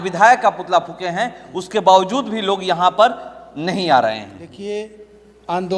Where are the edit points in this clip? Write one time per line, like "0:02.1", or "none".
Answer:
0:04.4